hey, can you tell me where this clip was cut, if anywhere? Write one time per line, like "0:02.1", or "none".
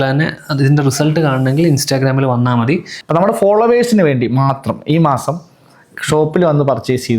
0:02.9